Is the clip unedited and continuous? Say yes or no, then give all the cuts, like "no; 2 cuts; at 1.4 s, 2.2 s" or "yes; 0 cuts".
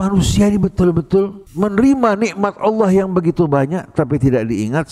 no; 1 cut; at 1.4 s